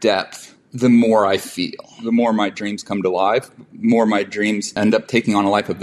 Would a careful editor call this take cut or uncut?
cut